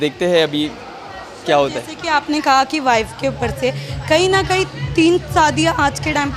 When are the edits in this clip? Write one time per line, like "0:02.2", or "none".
none